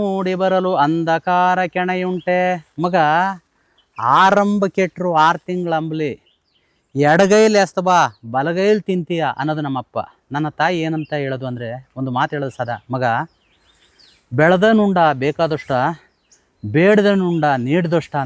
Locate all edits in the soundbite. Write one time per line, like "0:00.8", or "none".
none